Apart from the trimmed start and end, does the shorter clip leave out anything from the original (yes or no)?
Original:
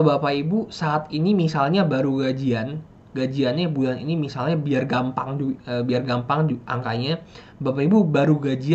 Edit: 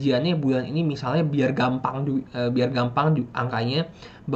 no